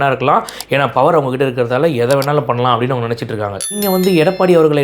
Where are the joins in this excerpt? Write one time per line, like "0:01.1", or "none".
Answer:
0:03.8